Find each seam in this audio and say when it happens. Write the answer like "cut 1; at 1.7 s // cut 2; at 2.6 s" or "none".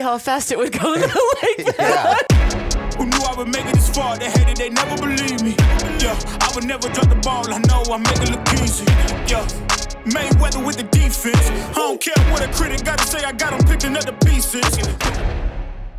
cut 1; at 2.2 s